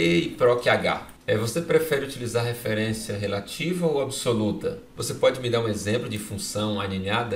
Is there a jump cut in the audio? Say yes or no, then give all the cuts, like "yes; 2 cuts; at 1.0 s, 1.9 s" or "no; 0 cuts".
yes; 2 cuts; at 1.1 s, 4.9 s